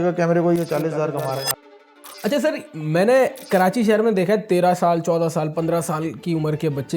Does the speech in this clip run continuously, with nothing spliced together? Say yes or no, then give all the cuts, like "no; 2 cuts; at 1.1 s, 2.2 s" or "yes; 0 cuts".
no; 1 cut; at 1.6 s